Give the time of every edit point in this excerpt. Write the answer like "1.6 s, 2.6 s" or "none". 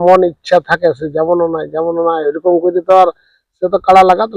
none